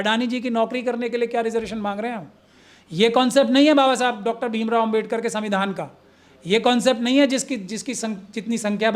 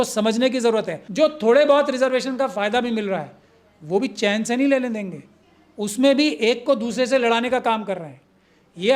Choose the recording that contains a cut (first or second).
second